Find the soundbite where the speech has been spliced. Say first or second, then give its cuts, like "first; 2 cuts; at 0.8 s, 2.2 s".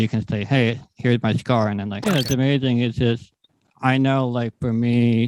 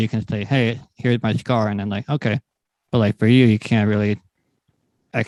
first; 1 cut; at 1.9 s